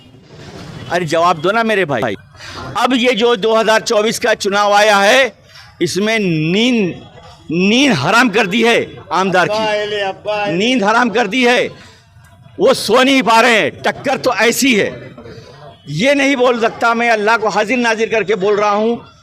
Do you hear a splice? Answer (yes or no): yes